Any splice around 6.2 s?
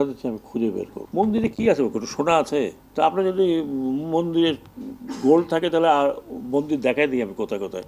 no; 2 cuts; at 1.0 s, 2.8 s

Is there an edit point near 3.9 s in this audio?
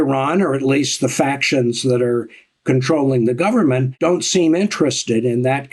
yes; 1 cut; at 3.9 s

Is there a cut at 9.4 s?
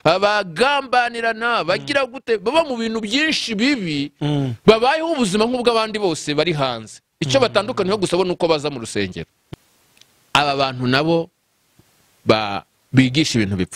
yes; 1 cut; at 9.4 s

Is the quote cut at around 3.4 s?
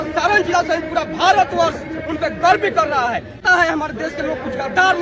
yes; 1 cut; at 3.4 s

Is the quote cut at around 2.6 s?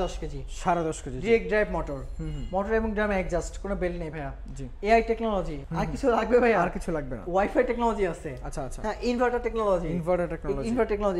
no; 1 cut; at 5.6 s

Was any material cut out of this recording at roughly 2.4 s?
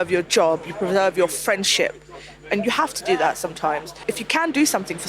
no; 1 cut; at 4.0 s

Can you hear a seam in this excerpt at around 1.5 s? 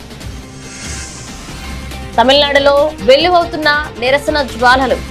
no; 0 cuts

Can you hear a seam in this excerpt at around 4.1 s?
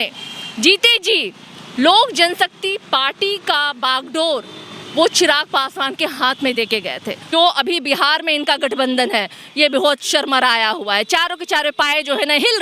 no; 1 cut; at 7.3 s

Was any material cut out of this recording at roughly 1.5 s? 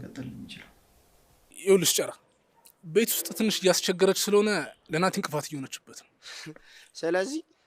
yes; 1 cut; at 1.5 s

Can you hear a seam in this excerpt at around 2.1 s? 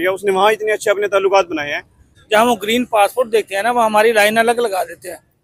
yes; 1 cut; at 2.1 s

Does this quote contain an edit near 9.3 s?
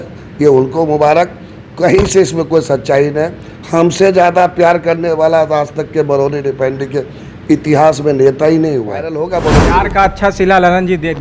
yes; 1 cut; at 9.3 s

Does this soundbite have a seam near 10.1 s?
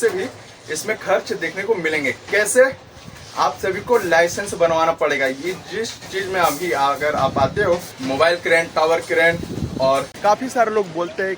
yes; 2 cuts; at 7.9 s, 10.1 s

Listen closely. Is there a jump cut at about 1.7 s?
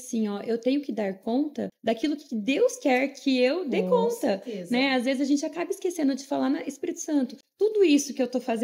yes; 2 cuts; at 1.7 s, 7.4 s

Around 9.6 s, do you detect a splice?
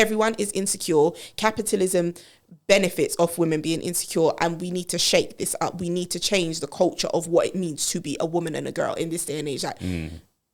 no; 0 cuts

